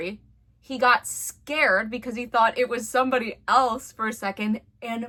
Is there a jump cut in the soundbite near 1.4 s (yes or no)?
no